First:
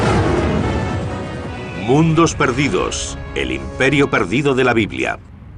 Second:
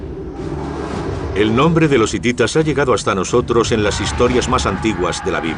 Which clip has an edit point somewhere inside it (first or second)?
first